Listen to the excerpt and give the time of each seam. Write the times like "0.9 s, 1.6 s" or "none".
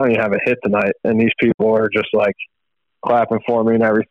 none